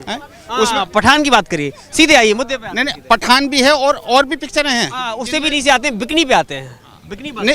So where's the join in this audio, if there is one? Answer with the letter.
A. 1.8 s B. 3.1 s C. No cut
C